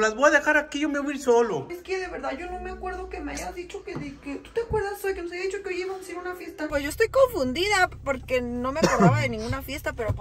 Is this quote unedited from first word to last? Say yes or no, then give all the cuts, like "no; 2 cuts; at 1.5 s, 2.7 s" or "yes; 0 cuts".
no; 2 cuts; at 1.7 s, 6.6 s